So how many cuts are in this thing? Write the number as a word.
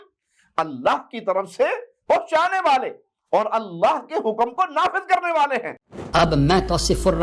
one